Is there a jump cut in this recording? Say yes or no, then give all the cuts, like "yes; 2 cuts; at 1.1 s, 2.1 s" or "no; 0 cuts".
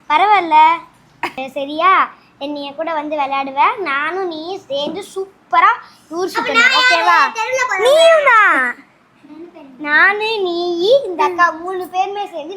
yes; 1 cut; at 1.3 s